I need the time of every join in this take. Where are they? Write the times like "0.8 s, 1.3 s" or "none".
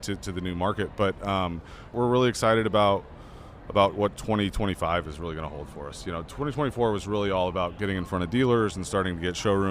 1.9 s